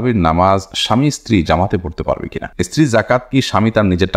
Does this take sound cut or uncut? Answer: cut